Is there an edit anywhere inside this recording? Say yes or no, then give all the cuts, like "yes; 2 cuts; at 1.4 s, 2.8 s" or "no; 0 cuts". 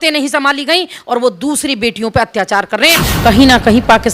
yes; 1 cut; at 3.1 s